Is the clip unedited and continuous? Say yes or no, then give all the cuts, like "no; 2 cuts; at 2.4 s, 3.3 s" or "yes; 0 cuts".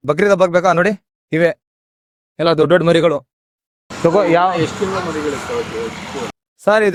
yes; 0 cuts